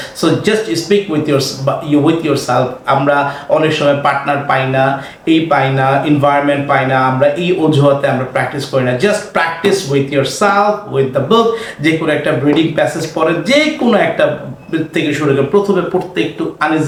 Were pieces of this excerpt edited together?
no; 0 cuts

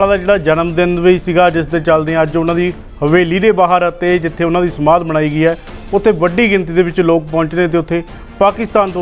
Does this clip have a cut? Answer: no; 0 cuts

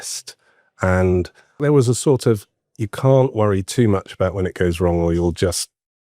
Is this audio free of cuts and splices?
no; 1 cut; at 1.6 s

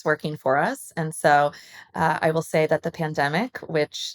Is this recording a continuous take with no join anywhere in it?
yes; 0 cuts

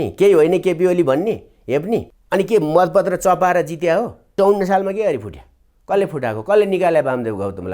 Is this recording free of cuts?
no; 2 cuts; at 2.1 s, 4.3 s

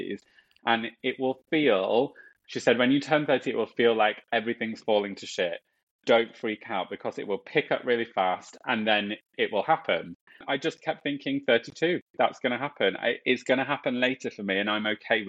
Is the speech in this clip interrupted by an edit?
yes; 2 cuts; at 5.8 s, 10.4 s

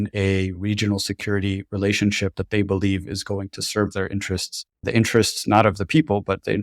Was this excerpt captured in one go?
no; 1 cut; at 4.9 s

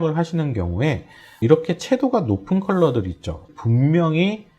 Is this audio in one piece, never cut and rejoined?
no; 2 cuts; at 1.4 s, 3.5 s

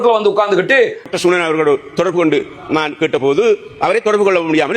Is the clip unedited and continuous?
no; 1 cut; at 1.1 s

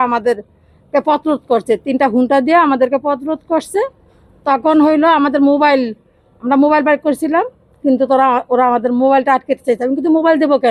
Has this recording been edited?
no; 0 cuts

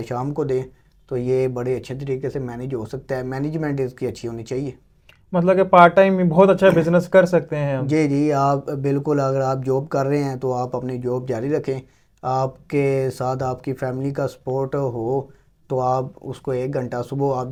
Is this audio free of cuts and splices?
yes; 0 cuts

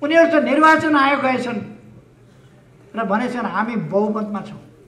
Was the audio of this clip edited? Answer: no; 0 cuts

